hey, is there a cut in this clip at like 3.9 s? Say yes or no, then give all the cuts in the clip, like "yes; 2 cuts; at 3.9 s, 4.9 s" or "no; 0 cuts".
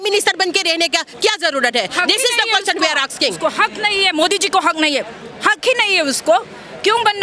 no; 0 cuts